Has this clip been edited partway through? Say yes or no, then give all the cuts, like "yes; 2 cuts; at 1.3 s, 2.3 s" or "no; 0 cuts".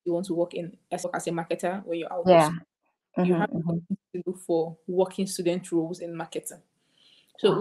yes; 1 cut; at 1.0 s